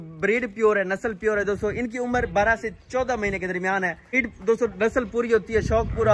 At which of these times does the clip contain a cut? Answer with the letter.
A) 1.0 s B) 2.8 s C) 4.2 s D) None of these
C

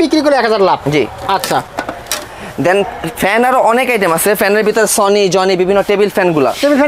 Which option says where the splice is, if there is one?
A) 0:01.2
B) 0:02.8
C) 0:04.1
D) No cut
D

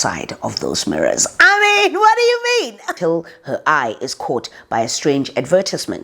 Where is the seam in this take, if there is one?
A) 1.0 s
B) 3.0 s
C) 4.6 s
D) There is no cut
B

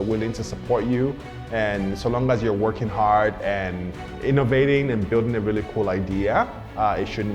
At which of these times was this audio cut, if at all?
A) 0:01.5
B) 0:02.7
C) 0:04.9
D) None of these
D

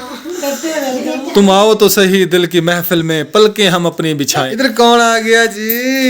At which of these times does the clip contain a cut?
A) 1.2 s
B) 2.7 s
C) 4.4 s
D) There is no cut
C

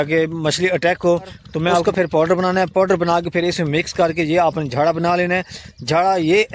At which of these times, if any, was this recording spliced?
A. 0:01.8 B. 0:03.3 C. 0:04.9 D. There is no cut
A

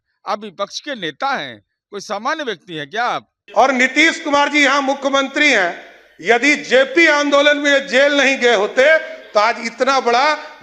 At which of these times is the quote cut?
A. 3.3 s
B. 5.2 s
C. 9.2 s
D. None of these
A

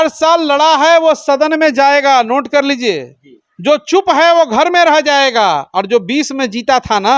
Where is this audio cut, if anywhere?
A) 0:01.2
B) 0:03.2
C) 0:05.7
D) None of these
D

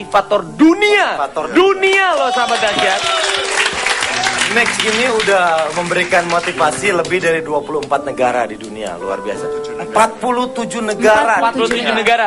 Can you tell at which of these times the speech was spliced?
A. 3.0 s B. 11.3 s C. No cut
C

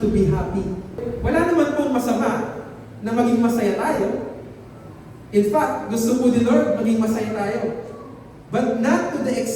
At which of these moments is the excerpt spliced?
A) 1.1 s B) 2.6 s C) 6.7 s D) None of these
A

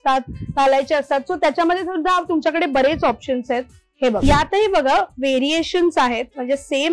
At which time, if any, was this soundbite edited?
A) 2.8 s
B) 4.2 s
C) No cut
B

